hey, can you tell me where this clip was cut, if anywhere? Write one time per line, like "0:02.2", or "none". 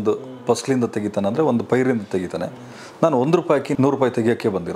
0:03.7